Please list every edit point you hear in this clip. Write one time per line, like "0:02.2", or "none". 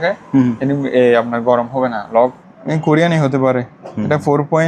0:02.4